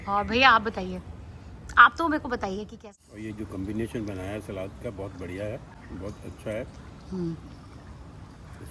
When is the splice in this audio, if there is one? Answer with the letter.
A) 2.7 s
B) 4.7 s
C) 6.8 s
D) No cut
A